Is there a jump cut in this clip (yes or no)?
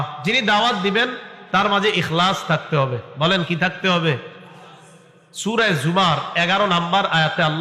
no